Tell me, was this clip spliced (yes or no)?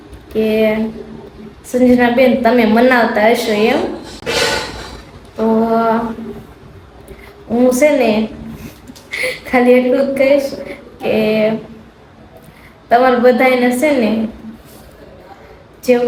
no